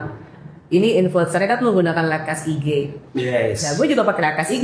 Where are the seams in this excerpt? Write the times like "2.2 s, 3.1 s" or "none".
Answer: none